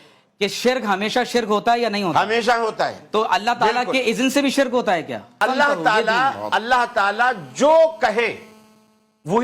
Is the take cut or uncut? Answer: cut